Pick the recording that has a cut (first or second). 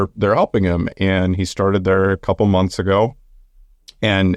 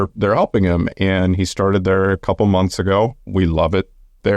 second